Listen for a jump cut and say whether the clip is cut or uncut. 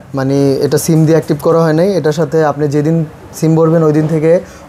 uncut